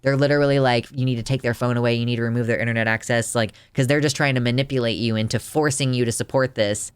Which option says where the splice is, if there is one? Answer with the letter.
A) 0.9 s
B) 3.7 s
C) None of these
A